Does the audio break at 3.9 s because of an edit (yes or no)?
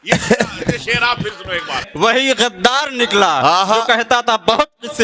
no